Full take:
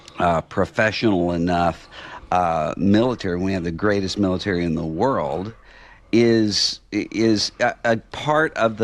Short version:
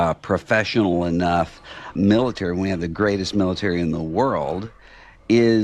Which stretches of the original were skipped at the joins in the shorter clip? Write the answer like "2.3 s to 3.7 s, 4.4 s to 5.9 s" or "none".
2.2 s to 2.7 s